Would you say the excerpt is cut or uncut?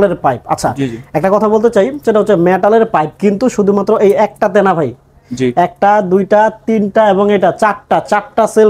uncut